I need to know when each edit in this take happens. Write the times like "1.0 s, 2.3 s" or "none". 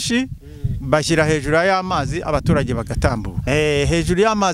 3.4 s